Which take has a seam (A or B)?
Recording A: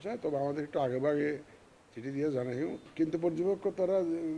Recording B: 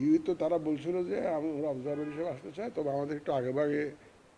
A